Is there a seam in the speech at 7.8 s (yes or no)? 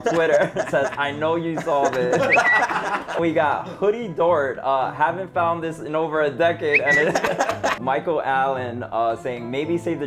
yes